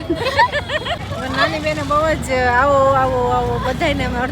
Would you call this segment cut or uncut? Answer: cut